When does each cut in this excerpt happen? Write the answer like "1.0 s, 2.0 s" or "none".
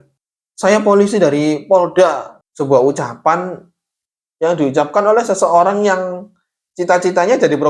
2.3 s